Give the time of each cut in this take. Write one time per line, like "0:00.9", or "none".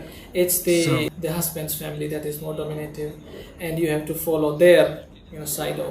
0:01.1